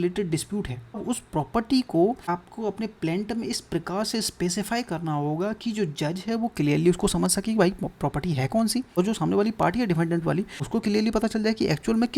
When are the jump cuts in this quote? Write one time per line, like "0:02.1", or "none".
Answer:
0:01.0
0:02.2
0:09.0
0:10.6